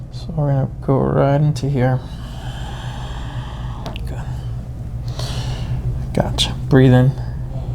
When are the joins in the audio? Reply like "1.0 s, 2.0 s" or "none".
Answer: none